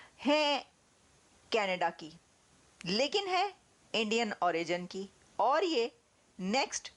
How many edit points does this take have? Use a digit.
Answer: 0